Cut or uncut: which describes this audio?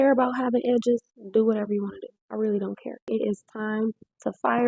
cut